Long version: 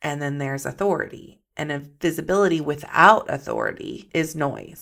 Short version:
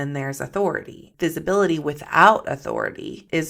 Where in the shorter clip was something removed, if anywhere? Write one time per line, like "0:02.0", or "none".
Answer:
0:01.0